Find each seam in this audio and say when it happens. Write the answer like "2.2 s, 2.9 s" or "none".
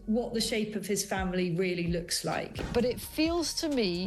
2.6 s

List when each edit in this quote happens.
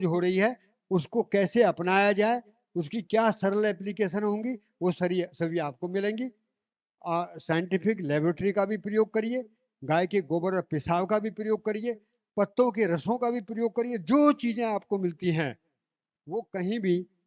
none

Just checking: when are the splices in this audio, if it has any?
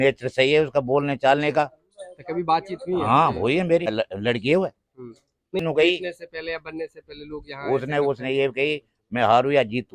3.9 s, 5.6 s

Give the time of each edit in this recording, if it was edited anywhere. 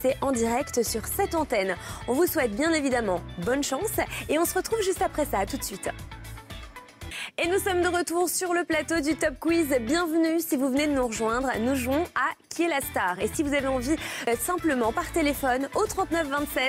none

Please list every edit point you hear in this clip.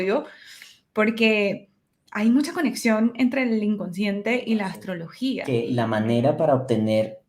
5.4 s

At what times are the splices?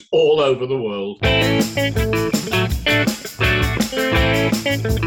1.1 s

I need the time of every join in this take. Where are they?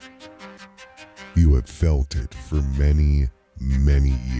1.3 s

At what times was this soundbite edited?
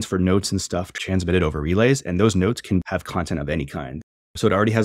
0.9 s, 2.8 s, 4.1 s

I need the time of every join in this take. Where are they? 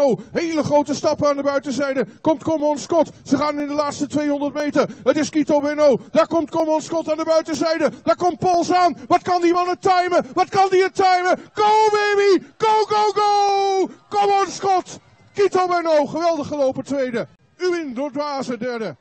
17.4 s

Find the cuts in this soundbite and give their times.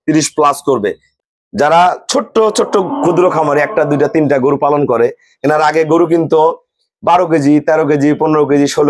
1.0 s

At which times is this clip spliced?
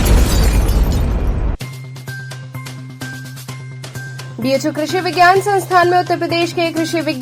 3.3 s

